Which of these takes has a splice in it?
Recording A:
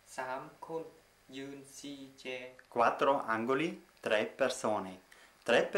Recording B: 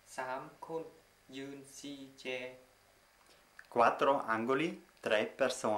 A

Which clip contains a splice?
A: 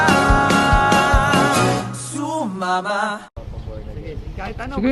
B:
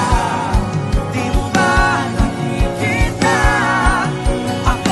A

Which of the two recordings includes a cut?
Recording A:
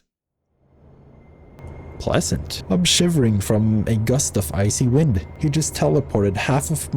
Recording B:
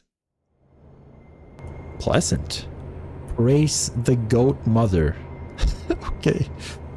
A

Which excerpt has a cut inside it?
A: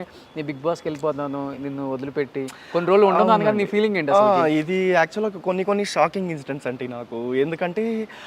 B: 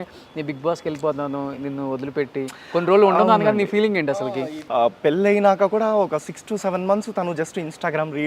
B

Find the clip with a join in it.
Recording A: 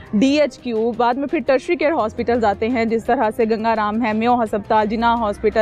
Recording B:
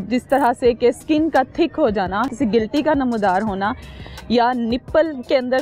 B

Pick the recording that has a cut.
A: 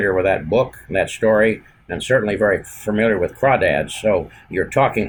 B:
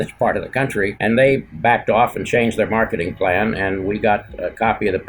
B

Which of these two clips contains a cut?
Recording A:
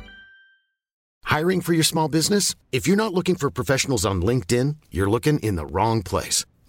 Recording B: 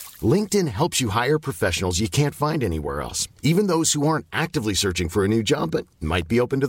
A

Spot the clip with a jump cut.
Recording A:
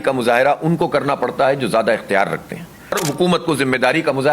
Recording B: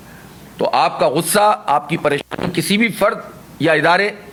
A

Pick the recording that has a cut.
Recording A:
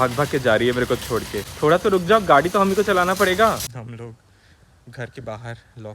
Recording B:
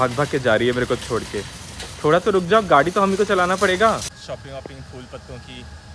A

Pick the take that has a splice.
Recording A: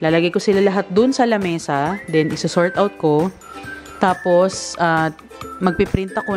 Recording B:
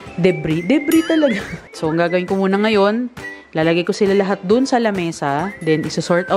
B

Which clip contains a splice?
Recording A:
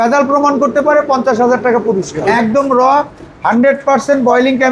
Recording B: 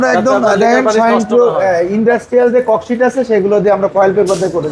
A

